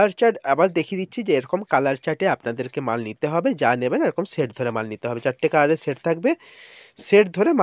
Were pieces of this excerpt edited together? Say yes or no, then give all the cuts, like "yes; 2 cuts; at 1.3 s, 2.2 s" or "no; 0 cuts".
no; 0 cuts